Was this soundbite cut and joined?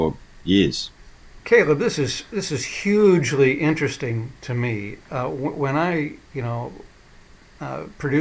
yes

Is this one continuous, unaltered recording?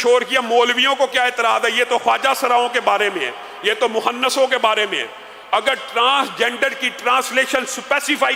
yes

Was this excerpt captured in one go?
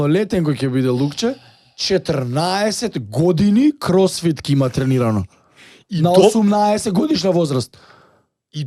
yes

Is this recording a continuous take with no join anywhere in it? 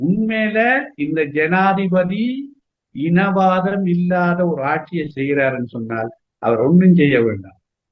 yes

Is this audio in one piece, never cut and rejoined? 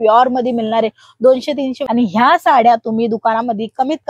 no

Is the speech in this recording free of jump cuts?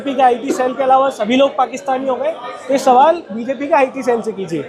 yes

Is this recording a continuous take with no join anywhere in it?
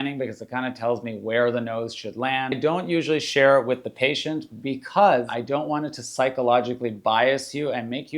no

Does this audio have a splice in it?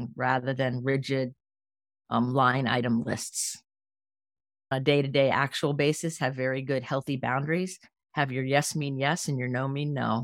yes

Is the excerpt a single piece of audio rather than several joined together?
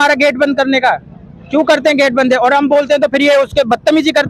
yes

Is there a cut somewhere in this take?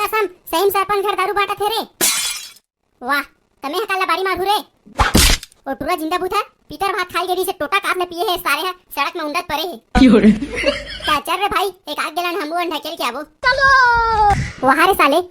yes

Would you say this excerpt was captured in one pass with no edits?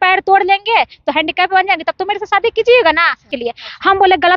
no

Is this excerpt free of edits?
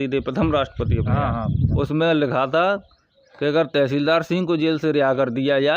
no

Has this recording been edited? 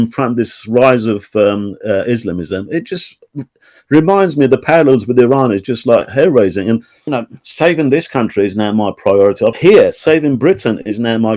yes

